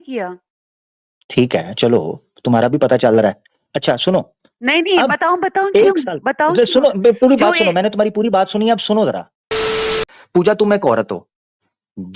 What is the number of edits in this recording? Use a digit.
1